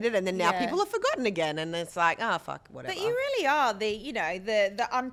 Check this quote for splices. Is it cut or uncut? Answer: uncut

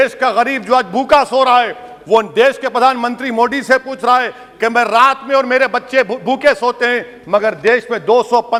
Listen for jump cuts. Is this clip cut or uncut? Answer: uncut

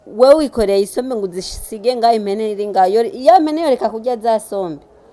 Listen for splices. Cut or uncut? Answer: uncut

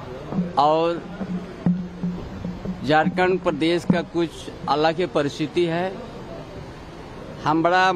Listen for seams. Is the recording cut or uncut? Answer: uncut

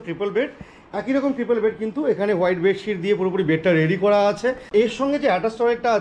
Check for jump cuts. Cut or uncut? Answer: cut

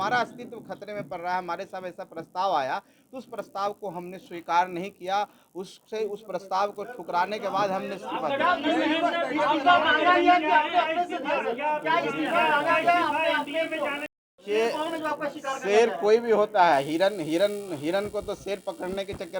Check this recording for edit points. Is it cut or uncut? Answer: uncut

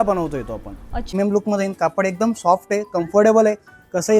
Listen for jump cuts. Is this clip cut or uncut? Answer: cut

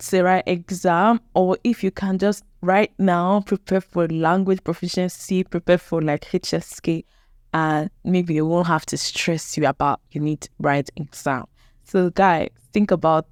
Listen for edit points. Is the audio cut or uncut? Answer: uncut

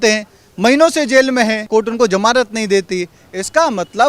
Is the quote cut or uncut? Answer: cut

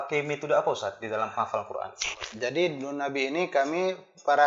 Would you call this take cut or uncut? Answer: uncut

